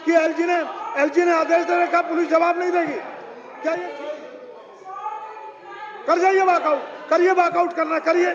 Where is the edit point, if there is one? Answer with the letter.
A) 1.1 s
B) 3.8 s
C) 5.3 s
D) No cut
B